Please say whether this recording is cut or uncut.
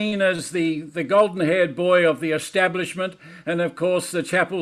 uncut